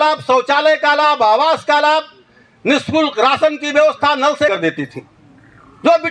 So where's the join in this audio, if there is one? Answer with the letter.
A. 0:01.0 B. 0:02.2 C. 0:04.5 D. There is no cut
C